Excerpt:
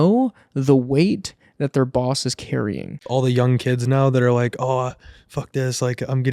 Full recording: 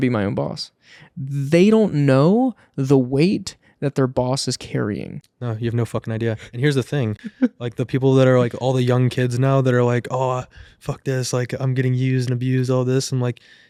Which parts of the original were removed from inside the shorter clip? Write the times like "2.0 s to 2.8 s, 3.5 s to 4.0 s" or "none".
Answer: 5.3 s to 8.5 s